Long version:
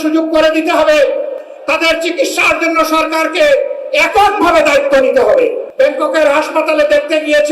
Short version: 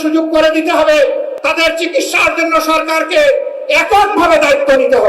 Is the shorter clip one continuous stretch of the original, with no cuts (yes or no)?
no